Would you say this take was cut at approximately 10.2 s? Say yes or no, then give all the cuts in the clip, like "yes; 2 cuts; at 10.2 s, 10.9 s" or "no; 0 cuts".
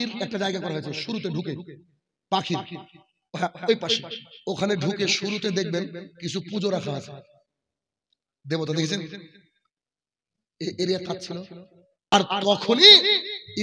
no; 1 cut; at 12.1 s